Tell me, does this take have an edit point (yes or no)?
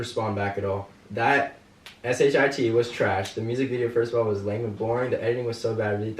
yes